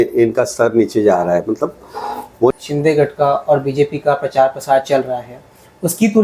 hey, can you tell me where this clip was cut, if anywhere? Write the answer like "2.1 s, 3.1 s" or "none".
2.5 s